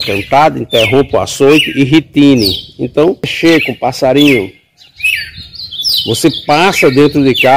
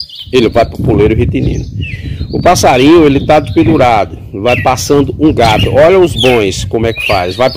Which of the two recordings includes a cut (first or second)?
first